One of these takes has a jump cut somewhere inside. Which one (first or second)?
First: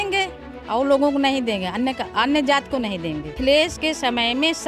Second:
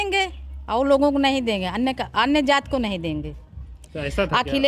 first